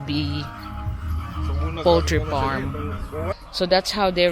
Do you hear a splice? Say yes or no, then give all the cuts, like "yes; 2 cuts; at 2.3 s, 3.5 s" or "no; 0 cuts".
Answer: yes; 1 cut; at 3.4 s